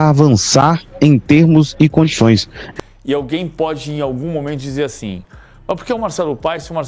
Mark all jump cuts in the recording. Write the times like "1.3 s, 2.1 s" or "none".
2.6 s

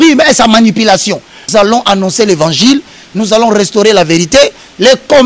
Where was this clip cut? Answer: 1.5 s

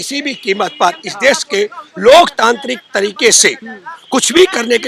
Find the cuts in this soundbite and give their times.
none

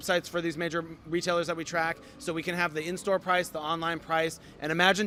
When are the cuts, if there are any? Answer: none

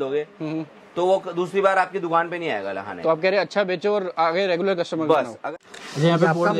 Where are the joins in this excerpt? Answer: 5.4 s

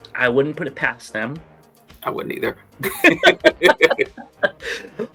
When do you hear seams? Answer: none

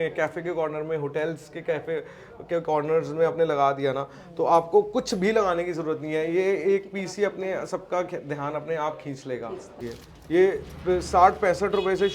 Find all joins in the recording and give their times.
9.8 s

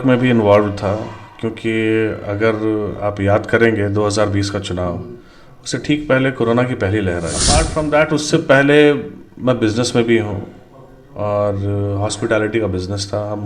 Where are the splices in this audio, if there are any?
7.6 s

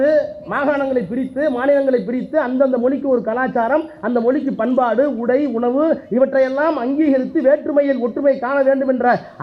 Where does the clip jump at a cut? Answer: none

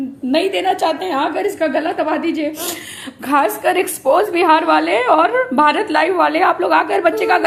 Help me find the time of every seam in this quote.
none

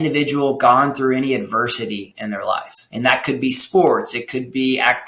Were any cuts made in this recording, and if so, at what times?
2.8 s

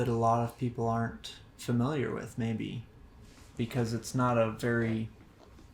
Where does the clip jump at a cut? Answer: 2.9 s

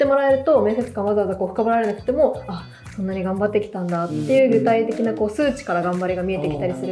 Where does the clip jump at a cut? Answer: none

